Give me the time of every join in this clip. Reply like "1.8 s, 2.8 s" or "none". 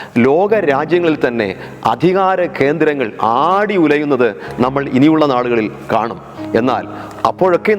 none